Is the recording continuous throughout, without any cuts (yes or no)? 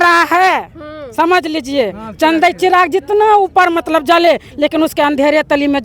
yes